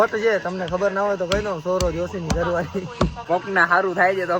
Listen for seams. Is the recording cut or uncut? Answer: cut